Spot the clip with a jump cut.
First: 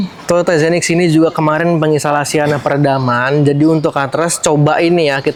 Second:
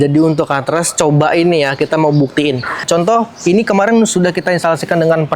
second; 1 cut; at 2.8 s

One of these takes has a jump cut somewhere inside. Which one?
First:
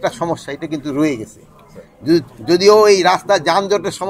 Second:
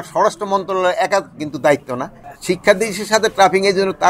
second; 1 cut; at 2.3 s

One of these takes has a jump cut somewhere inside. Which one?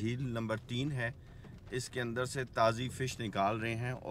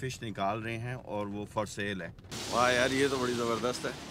second; 1 cut; at 2.3 s

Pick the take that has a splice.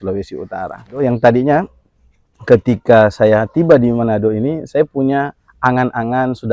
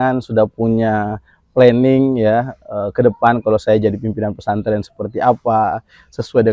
first; 1 cut; at 1.0 s

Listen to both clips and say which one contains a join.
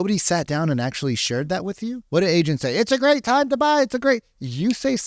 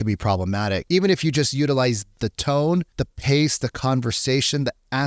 second; 3 cuts; at 0.8 s, 2.2 s, 3.0 s

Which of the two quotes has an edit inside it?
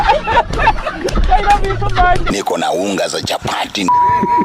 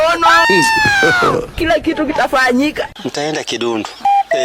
first; 1 cut; at 2.2 s

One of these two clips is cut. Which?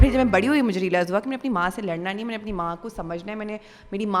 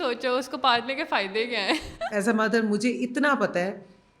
second; 1 cut; at 2.0 s

